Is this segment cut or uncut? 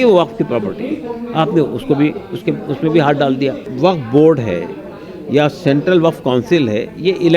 cut